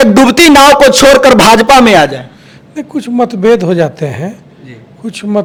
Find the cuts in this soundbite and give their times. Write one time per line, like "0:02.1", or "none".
none